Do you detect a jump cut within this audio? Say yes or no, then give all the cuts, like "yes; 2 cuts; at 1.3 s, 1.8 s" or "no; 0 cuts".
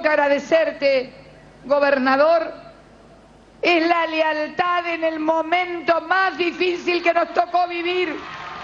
no; 0 cuts